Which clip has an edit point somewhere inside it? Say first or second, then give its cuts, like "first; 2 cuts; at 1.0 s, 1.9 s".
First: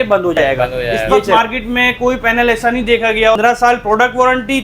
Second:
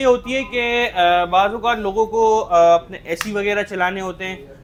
first; 2 cuts; at 1.3 s, 3.4 s